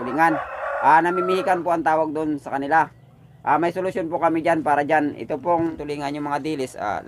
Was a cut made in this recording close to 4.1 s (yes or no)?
no